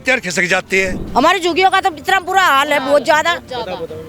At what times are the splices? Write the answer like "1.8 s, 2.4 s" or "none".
1.0 s